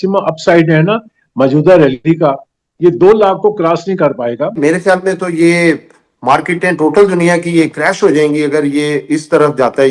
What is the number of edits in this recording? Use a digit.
1